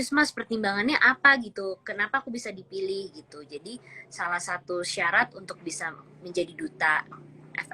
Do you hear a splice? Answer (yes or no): no